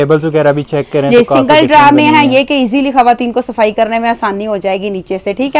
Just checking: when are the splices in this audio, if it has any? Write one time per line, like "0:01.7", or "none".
none